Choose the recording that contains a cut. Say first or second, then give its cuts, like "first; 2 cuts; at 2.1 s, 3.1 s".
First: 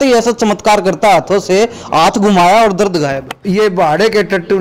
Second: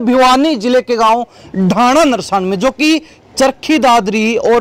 first; 1 cut; at 3.3 s